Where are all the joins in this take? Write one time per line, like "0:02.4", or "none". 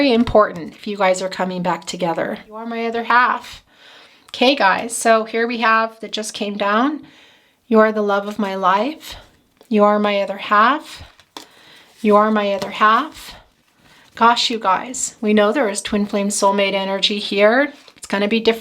0:02.8